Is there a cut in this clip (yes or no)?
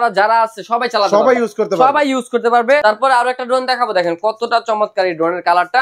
yes